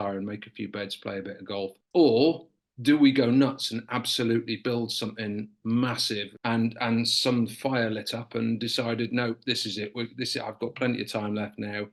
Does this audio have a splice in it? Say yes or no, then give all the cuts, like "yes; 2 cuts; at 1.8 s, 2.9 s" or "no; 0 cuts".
no; 0 cuts